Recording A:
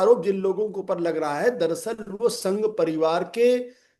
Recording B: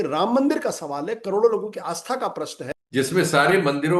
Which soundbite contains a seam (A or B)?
B